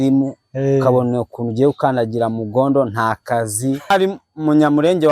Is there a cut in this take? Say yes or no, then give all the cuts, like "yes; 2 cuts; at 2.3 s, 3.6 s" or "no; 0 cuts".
yes; 1 cut; at 3.9 s